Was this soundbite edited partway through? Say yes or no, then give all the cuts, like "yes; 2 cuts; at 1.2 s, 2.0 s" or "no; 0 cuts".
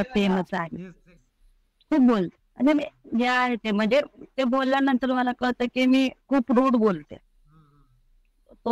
yes; 1 cut; at 1.0 s